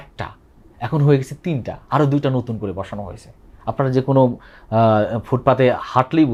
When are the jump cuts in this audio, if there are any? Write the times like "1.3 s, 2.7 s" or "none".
none